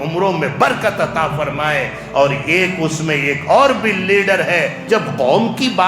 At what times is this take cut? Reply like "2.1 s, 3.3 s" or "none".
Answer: 4.8 s